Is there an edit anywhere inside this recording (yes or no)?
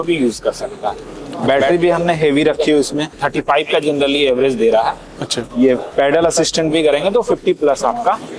yes